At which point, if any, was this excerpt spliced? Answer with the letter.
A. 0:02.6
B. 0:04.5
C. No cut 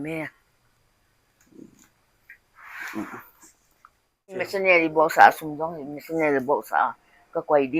B